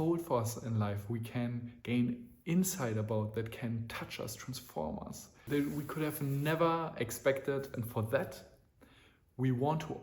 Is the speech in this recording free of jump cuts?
no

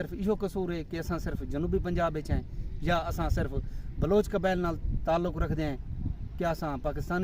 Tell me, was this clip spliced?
no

